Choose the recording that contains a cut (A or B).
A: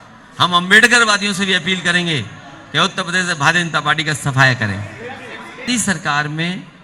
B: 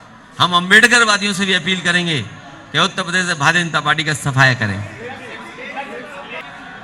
A